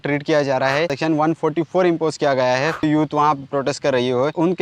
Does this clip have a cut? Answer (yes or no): no